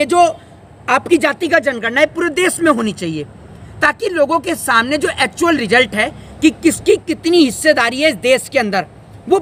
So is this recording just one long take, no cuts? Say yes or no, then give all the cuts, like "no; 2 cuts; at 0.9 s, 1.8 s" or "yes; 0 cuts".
yes; 0 cuts